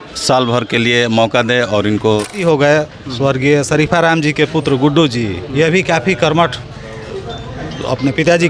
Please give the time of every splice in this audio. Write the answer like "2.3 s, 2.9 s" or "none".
2.4 s